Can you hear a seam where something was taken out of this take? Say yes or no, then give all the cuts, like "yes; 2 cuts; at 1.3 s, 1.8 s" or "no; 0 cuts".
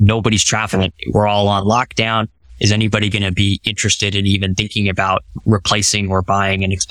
yes; 2 cuts; at 0.9 s, 5.4 s